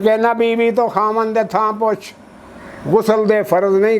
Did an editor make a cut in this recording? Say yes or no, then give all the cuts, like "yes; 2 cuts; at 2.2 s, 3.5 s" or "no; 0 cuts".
no; 0 cuts